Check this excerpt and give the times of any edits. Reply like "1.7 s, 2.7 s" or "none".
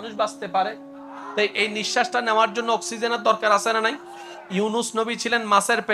1.3 s